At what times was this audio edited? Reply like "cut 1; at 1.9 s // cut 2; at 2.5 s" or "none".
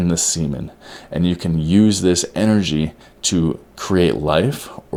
none